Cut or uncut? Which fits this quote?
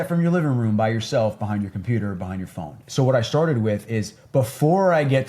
cut